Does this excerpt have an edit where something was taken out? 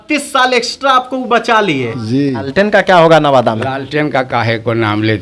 yes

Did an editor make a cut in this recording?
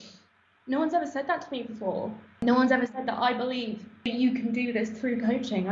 yes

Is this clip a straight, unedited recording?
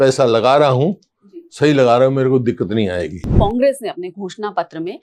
no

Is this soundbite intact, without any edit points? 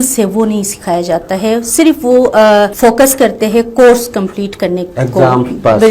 yes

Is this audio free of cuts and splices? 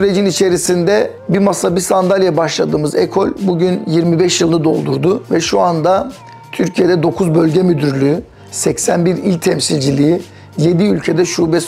yes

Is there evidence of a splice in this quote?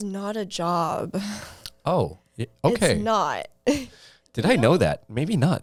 no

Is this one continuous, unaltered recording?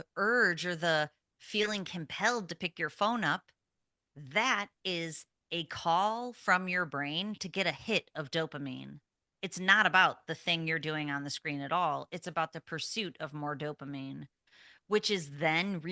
yes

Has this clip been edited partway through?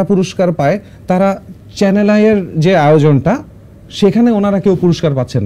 no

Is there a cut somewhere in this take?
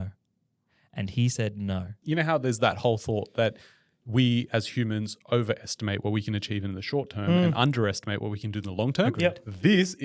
yes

